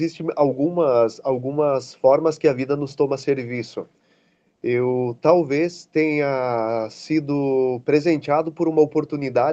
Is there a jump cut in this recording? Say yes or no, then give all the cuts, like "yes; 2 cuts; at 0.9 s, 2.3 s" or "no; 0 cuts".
no; 0 cuts